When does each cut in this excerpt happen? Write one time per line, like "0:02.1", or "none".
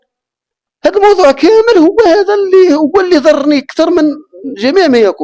none